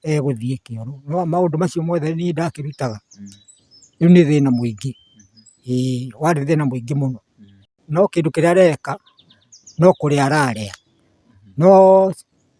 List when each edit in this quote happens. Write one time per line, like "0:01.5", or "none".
0:07.8